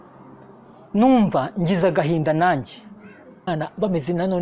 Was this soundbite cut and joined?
yes; 1 cut; at 3.5 s

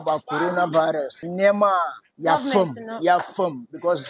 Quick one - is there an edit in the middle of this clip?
yes; 2 cuts; at 1.2 s, 2.0 s

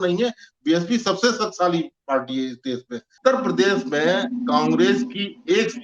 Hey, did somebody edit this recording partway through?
yes; 1 cut; at 3.2 s

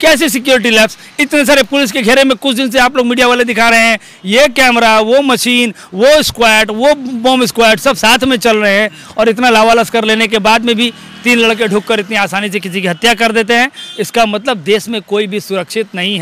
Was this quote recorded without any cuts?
yes; 0 cuts

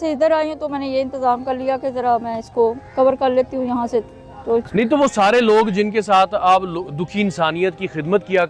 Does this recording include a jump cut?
no; 0 cuts

